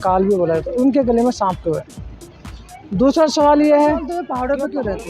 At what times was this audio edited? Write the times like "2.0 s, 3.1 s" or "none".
4.2 s